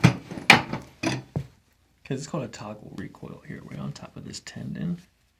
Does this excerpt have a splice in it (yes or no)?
no